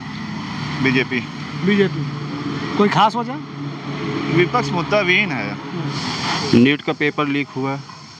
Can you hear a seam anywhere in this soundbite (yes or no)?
yes